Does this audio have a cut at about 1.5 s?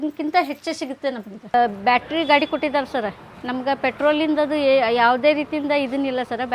yes; 1 cut; at 1.5 s

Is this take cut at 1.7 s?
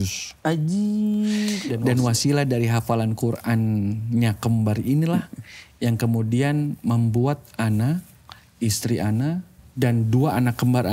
yes; 2 cuts; at 1.7 s, 9.6 s

